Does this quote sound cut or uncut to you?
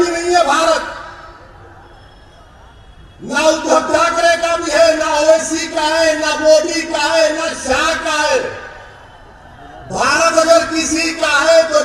uncut